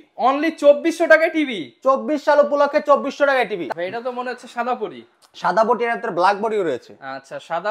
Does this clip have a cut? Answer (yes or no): yes